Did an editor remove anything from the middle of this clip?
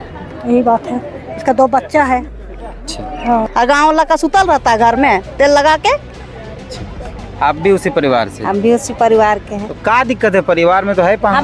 yes; 1 cut; at 3.5 s

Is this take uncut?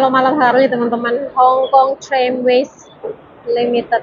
yes; 0 cuts

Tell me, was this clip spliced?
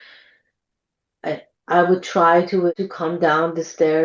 yes; 1 cut; at 2.7 s

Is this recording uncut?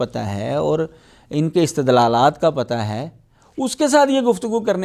yes; 0 cuts

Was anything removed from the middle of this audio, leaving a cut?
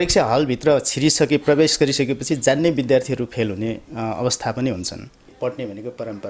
yes; 1 cut; at 5.3 s

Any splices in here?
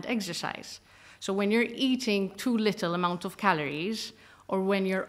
no; 0 cuts

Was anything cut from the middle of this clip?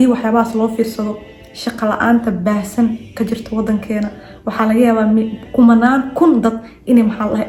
no; 0 cuts

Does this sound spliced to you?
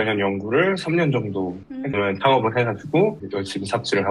yes; 1 cut; at 2.0 s

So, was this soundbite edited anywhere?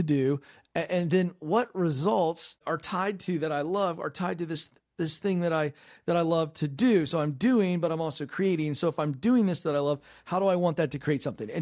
yes; 1 cut; at 2.6 s

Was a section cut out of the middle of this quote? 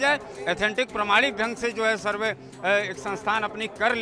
no; 0 cuts

